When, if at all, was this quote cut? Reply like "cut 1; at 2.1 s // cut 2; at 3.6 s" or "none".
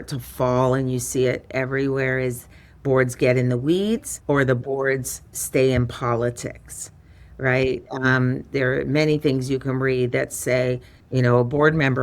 cut 1; at 4.1 s